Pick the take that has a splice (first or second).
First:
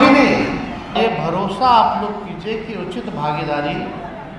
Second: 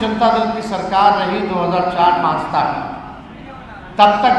first